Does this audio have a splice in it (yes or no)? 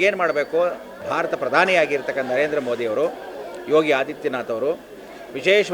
yes